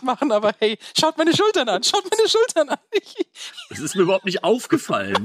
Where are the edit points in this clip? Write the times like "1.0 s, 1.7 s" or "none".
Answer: none